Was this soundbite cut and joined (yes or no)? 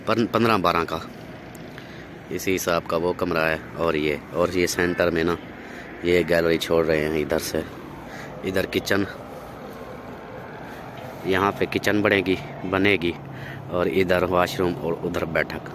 no